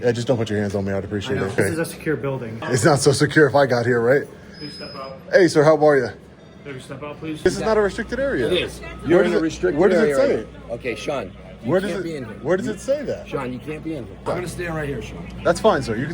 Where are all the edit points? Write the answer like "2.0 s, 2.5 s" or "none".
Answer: 1.6 s, 2.6 s, 7.5 s, 14.2 s